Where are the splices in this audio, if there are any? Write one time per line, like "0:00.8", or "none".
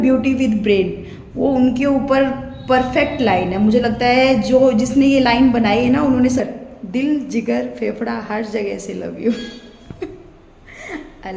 0:06.4